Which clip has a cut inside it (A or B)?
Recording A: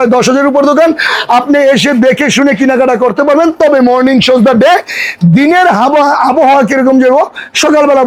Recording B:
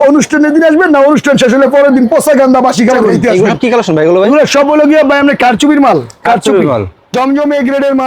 B